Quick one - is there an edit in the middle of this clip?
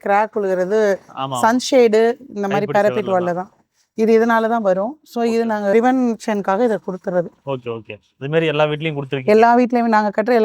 no; 0 cuts

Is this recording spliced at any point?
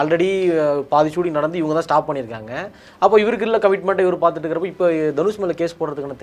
no; 0 cuts

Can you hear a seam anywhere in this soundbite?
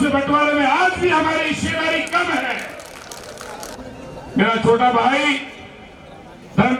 yes; 1 cut; at 3.8 s

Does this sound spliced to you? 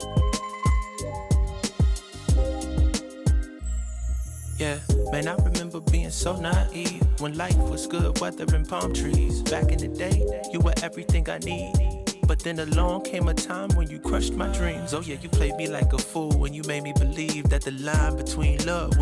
no; 0 cuts

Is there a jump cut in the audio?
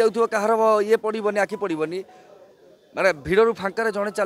no; 0 cuts

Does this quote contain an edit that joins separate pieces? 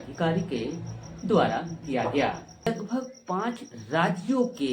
yes; 1 cut; at 2.7 s

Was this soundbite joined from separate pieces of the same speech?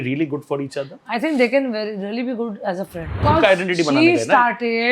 yes; 1 cut; at 3.2 s

